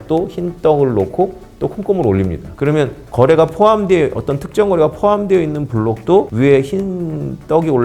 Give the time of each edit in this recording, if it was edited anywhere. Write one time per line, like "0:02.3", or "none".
none